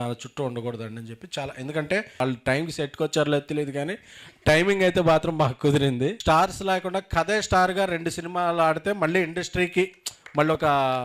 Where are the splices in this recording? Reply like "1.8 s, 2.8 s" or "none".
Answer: 2.2 s, 6.2 s